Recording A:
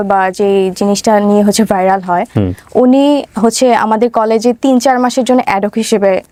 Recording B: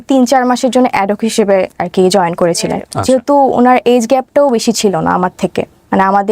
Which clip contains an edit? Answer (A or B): B